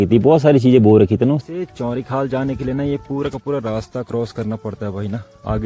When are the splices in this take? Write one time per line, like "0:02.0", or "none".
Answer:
0:01.4